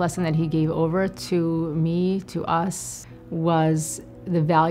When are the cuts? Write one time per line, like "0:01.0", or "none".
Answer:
none